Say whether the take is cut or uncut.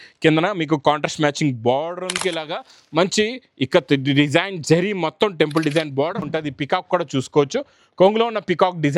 cut